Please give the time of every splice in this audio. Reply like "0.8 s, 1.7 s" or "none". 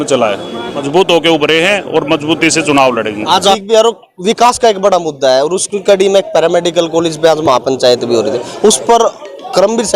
0.8 s, 3.6 s